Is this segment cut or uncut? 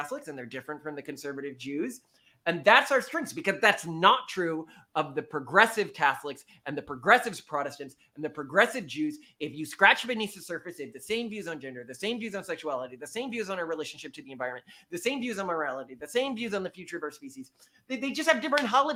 uncut